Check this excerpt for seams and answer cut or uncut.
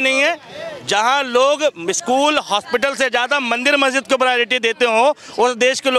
uncut